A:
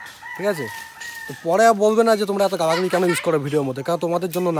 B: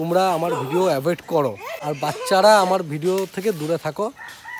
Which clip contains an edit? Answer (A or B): B